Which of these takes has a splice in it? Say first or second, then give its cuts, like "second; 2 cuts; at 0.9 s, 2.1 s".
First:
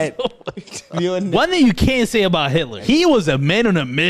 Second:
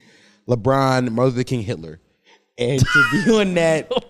first; 2 cuts; at 1.3 s, 2.8 s